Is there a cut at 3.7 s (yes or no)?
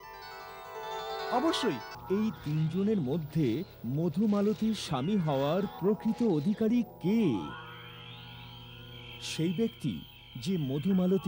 no